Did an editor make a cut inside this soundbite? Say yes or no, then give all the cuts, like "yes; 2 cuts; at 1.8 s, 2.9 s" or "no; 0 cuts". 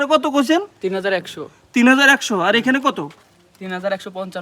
no; 0 cuts